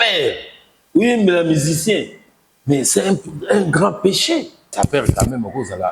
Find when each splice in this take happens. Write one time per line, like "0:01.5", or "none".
0:04.6